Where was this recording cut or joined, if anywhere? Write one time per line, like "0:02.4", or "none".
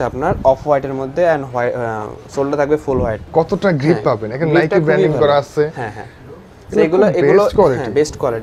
none